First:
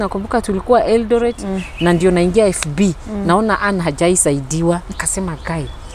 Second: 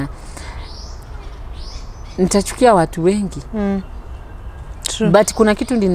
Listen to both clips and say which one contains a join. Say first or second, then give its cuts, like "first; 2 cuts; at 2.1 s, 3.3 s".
first; 1 cut; at 1.4 s